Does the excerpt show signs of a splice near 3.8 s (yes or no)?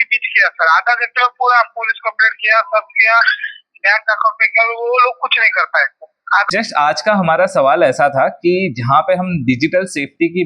no